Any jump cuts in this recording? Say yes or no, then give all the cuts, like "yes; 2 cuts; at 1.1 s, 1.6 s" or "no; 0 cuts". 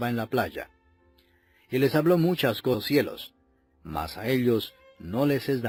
no; 0 cuts